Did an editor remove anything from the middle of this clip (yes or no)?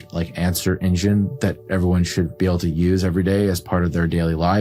no